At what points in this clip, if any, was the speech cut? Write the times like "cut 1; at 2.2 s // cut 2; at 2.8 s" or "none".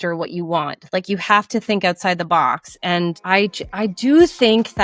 cut 1; at 3.2 s